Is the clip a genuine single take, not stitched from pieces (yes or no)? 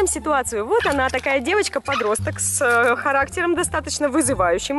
no